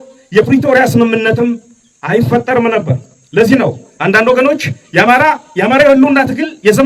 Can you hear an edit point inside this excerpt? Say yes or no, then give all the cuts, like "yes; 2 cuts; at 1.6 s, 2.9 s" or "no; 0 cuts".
no; 0 cuts